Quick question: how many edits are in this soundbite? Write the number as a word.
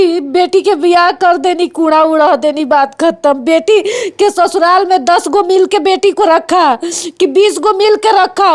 zero